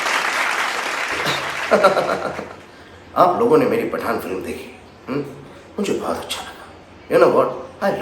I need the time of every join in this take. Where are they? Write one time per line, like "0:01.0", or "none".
0:01.1